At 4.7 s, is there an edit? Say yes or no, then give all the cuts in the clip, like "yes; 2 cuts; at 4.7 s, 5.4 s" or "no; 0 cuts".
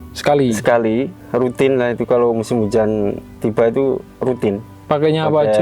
yes; 3 cuts; at 1.2 s, 3.3 s, 4.7 s